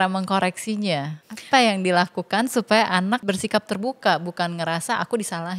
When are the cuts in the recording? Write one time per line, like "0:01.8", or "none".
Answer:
0:01.2
0:03.2